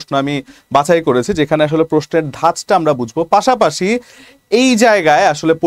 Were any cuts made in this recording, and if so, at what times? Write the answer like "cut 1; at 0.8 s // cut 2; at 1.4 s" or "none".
none